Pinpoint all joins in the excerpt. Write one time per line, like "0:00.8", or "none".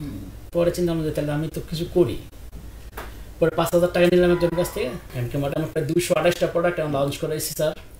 0:05.0